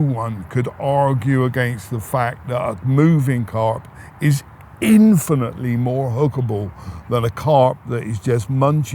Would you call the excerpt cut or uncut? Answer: uncut